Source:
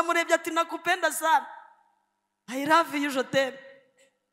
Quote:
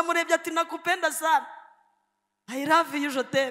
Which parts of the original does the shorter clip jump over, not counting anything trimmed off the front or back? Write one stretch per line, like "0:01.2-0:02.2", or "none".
none